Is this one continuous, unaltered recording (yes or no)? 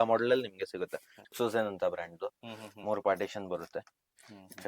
no